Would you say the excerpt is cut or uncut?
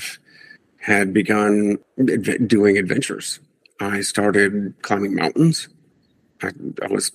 cut